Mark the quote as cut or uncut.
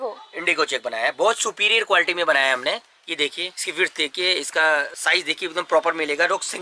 uncut